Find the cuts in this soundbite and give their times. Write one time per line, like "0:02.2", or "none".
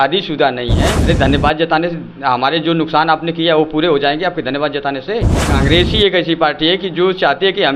0:00.9
0:05.4